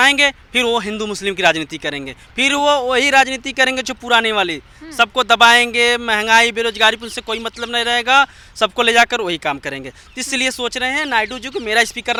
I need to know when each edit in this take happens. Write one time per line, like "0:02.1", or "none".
none

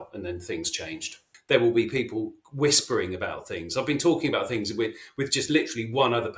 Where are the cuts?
0:01.3

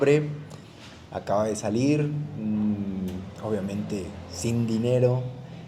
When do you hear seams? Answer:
none

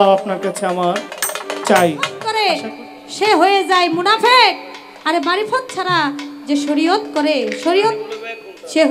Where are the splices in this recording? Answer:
0:02.3

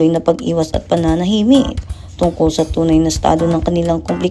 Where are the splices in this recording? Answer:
none

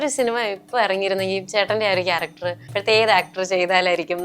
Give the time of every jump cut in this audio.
0:02.7

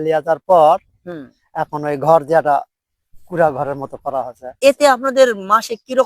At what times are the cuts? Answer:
0:04.4

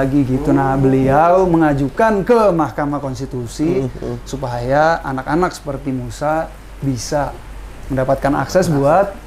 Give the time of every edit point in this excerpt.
none

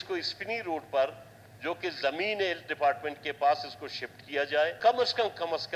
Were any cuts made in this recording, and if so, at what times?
0:04.8

